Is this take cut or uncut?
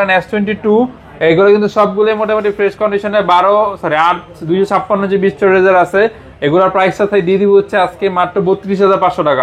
uncut